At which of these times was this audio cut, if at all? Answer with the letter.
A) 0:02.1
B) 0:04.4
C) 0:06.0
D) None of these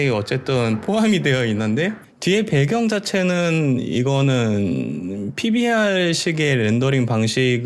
A